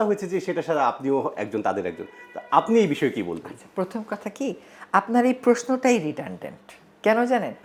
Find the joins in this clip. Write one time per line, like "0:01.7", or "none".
none